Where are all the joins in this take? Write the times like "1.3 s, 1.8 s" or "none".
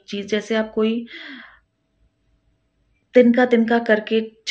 none